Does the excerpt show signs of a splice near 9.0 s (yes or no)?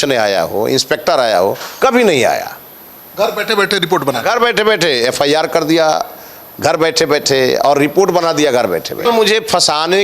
yes